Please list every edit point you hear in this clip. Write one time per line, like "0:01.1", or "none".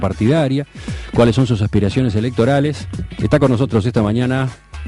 none